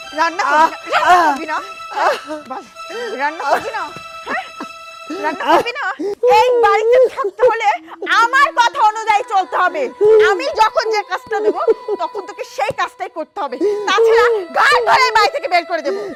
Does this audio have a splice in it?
no; 0 cuts

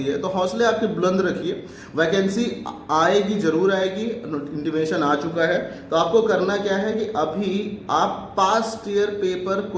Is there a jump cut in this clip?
no; 0 cuts

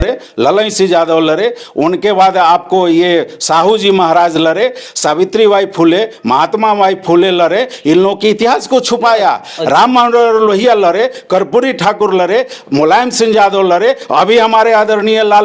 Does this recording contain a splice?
no; 0 cuts

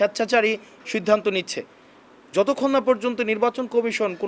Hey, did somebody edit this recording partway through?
no; 0 cuts

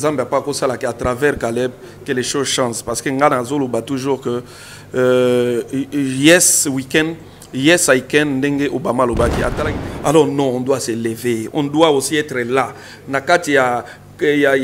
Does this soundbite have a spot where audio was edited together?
yes; 1 cut; at 9.7 s

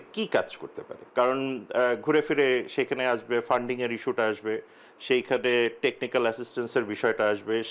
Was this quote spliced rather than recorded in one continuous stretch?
no; 0 cuts

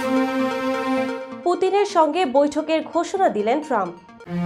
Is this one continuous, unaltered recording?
yes; 0 cuts

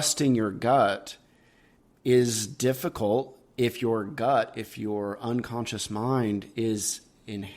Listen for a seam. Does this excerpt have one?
no; 0 cuts

